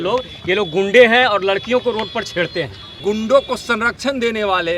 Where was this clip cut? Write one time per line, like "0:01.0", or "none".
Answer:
0:03.0